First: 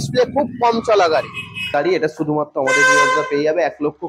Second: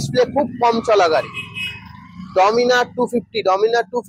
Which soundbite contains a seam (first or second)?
first